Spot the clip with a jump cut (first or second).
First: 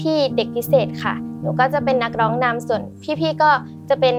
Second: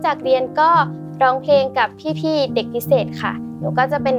second